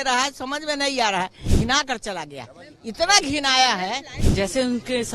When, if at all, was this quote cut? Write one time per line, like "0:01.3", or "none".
0:01.4
0:04.2